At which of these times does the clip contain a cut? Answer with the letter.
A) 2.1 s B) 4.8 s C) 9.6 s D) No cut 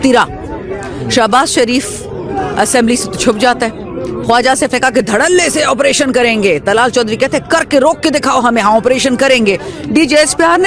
D